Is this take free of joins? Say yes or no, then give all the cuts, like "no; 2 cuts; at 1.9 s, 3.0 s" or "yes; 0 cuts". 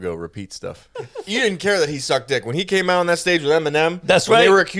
no; 1 cut; at 0.9 s